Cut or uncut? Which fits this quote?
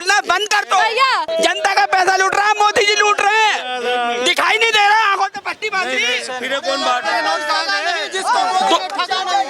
cut